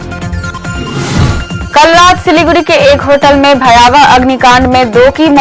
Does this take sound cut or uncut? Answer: cut